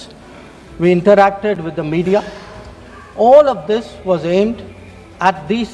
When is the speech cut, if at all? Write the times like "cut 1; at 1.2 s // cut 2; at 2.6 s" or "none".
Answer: none